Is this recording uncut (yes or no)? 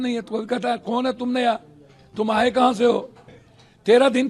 yes